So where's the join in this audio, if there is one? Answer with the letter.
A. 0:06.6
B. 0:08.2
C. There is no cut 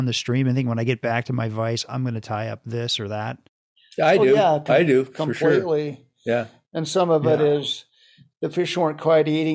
C